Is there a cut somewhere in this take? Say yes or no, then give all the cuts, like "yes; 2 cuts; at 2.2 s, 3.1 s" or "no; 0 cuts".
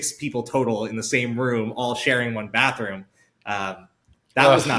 no; 0 cuts